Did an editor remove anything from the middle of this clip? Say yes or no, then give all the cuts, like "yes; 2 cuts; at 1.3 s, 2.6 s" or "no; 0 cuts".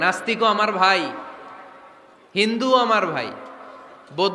no; 0 cuts